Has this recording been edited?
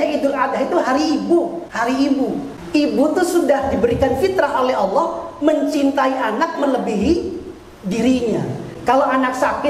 yes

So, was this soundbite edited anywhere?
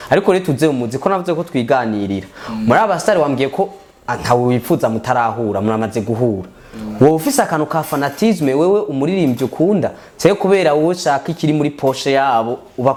no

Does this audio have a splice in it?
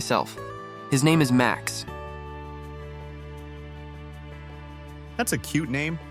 no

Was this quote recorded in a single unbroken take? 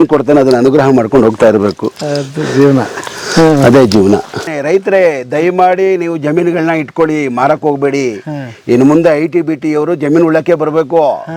no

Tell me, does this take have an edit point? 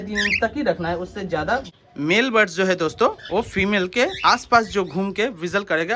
yes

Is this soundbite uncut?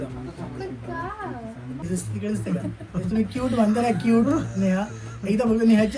no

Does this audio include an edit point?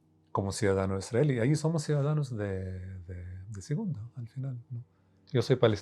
yes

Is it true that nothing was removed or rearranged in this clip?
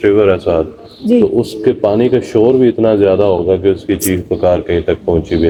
yes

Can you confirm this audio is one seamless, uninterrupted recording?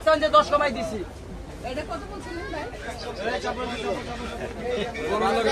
yes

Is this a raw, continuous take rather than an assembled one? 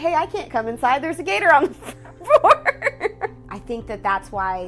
no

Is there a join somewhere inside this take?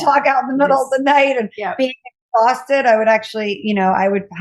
no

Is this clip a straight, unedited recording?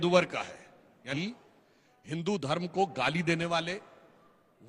no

